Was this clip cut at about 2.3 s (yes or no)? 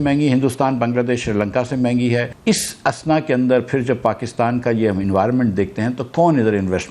yes